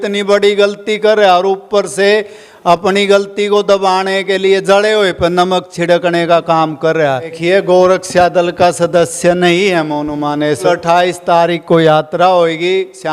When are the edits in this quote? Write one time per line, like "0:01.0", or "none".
0:07.3
0:10.6